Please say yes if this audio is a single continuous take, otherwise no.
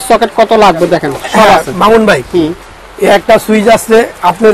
yes